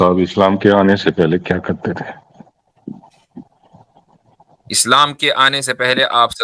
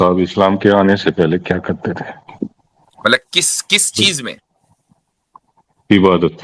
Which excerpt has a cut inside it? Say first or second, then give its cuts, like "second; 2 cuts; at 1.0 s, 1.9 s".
second; 1 cut; at 2.3 s